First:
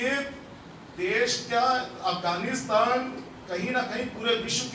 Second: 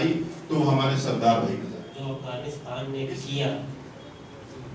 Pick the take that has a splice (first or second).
second